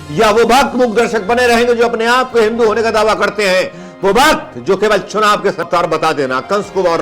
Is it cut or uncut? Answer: cut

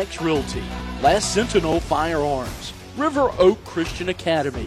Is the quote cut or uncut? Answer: uncut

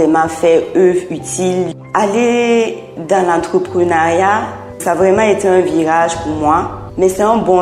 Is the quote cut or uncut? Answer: cut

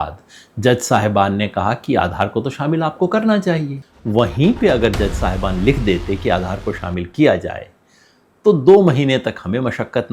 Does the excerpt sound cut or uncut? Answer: cut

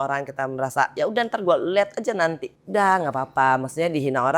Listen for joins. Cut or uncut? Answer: cut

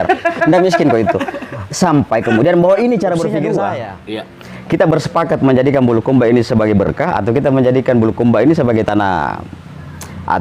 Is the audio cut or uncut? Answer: cut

